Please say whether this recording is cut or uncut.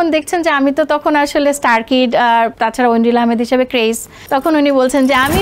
cut